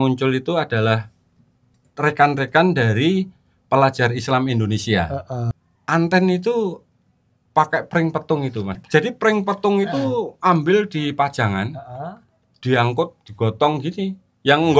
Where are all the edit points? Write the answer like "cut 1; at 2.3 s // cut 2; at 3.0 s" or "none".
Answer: cut 1; at 5.5 s // cut 2; at 8.8 s